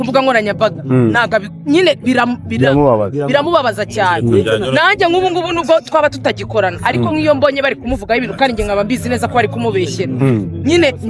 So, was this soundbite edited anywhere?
no; 0 cuts

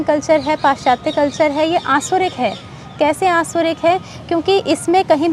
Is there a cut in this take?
no; 0 cuts

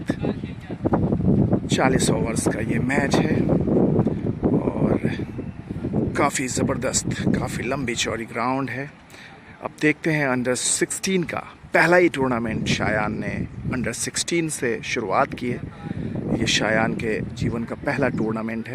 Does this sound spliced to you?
no; 0 cuts

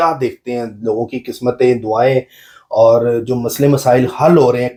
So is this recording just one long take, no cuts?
yes; 0 cuts

